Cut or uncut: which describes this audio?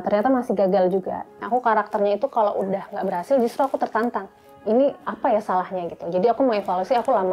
cut